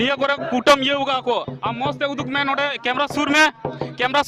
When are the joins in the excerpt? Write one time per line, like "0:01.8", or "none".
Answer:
none